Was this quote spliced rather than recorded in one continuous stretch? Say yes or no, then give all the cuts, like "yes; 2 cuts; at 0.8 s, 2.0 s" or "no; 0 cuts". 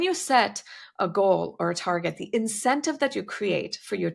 no; 0 cuts